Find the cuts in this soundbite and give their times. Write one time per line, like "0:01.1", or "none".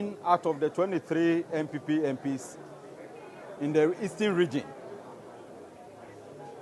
none